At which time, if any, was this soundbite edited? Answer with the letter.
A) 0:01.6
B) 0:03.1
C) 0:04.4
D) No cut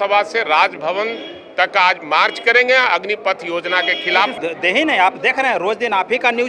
C